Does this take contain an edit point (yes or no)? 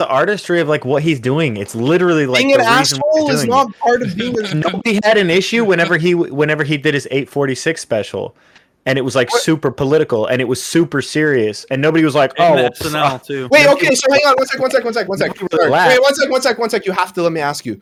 no